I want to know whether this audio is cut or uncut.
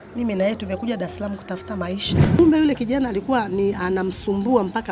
cut